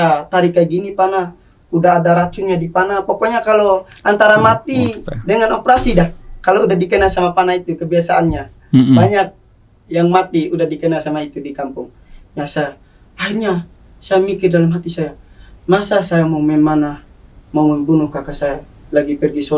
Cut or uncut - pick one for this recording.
uncut